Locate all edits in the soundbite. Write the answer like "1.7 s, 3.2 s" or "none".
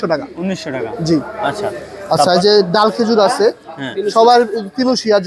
none